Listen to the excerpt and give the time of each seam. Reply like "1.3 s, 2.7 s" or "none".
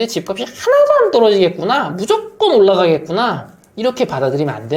none